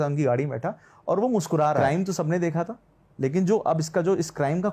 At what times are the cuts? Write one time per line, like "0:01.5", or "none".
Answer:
0:01.8